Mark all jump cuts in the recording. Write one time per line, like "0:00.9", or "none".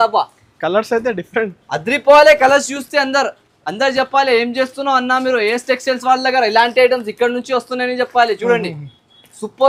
none